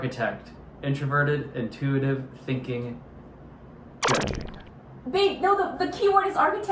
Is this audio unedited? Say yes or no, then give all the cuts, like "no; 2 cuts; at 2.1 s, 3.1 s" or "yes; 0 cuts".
yes; 0 cuts